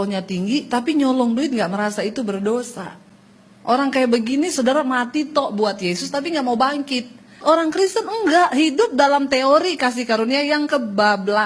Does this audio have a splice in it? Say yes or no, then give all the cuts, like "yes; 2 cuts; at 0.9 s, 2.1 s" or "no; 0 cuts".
yes; 1 cut; at 7.4 s